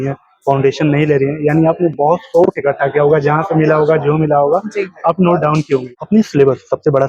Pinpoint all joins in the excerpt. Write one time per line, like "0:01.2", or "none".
0:05.9